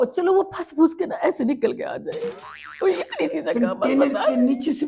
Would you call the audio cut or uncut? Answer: uncut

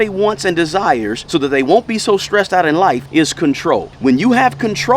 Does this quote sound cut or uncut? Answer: cut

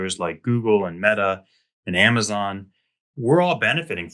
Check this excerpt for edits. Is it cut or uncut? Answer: uncut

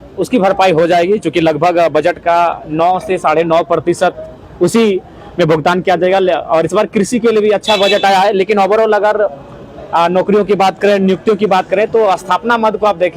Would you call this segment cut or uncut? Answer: uncut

